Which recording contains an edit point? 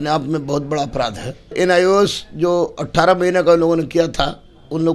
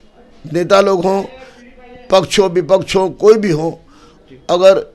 first; 1 cut; at 1.5 s

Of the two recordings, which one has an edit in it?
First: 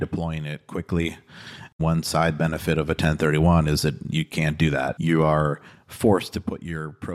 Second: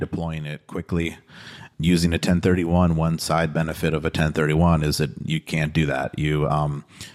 first; 2 cuts; at 1.8 s, 5.0 s

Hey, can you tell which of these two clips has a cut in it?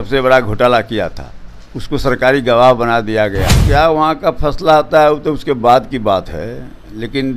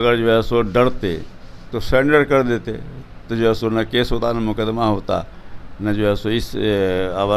first; 1 cut; at 3.5 s

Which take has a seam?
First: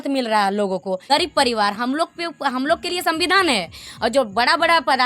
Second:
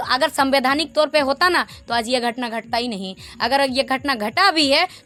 first; 1 cut; at 1.0 s

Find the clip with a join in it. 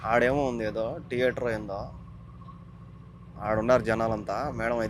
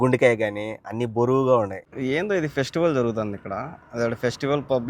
second; 1 cut; at 1.8 s

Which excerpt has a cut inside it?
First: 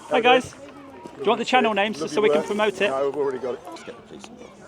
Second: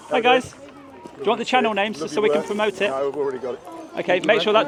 first; 1 cut; at 3.8 s

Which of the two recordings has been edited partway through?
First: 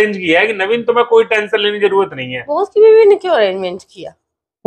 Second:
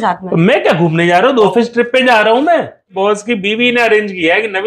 second; 2 cuts; at 1.5 s, 2.9 s

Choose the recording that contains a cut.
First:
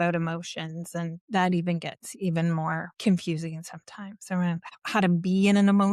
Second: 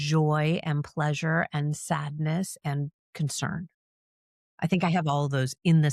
first; 3 cuts; at 1.2 s, 2.9 s, 4.7 s

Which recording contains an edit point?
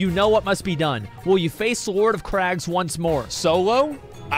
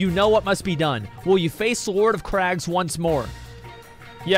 first; 1 cut; at 3.3 s

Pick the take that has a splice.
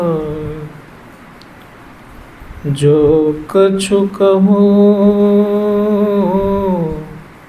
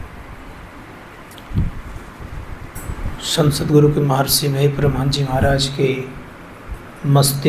second; 1 cut; at 2.8 s

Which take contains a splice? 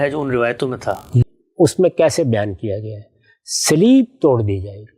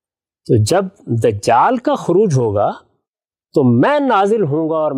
first; 1 cut; at 1.1 s

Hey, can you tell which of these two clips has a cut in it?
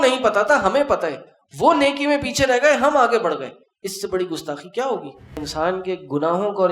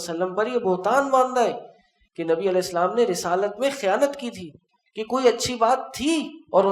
first; 1 cut; at 5.5 s

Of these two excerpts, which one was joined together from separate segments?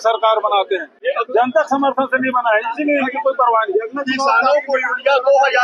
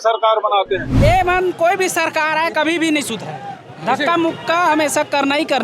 second; 1 cut; at 0.9 s

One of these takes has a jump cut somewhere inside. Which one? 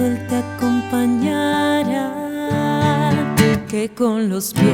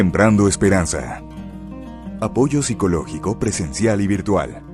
second; 1 cut; at 3.4 s

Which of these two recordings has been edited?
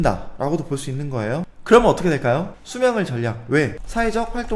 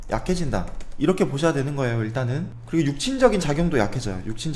first; 2 cuts; at 1.5 s, 2.5 s

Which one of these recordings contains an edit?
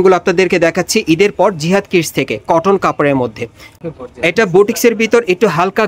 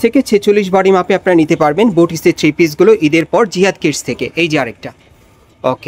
first; 1 cut; at 3.7 s

